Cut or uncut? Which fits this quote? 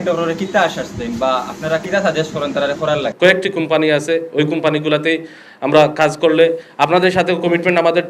cut